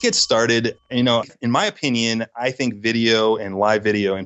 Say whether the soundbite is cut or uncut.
cut